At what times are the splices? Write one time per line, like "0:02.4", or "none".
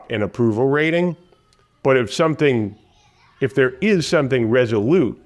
none